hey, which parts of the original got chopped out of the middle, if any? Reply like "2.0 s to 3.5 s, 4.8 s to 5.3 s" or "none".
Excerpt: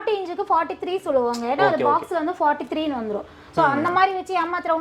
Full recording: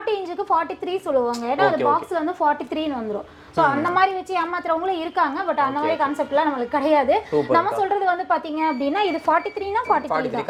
none